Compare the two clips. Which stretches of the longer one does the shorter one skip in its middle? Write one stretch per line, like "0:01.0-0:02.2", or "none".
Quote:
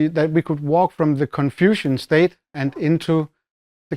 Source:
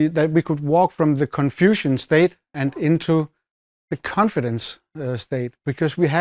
none